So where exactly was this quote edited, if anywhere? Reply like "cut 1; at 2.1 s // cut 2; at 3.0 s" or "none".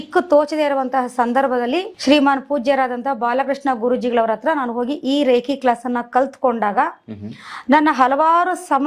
none